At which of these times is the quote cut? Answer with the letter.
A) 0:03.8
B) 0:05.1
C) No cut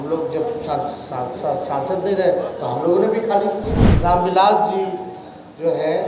A